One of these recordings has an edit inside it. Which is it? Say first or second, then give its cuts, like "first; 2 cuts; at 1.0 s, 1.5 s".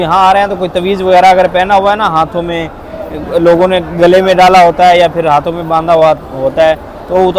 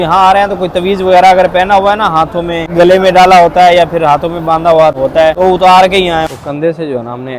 second; 3 cuts; at 2.7 s, 5.1 s, 6.3 s